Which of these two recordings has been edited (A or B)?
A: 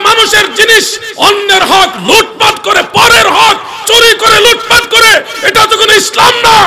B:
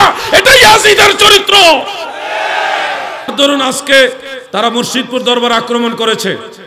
B